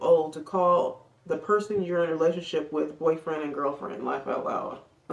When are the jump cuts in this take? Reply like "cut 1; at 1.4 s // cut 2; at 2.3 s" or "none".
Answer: none